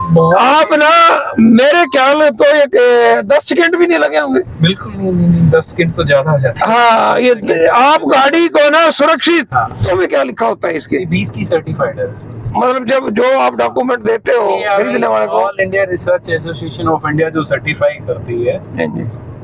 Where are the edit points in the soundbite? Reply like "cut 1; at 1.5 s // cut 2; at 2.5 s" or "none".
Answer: cut 1; at 9.8 s